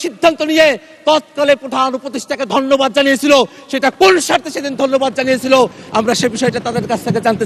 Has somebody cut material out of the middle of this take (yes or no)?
no